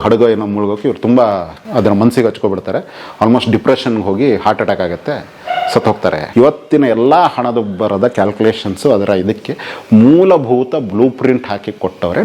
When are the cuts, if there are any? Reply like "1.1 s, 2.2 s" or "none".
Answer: 1.5 s, 6.2 s